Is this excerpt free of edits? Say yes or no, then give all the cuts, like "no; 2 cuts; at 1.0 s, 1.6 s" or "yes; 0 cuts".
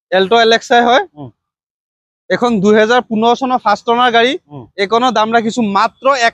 yes; 0 cuts